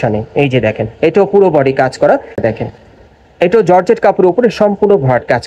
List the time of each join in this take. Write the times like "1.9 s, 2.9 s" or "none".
2.4 s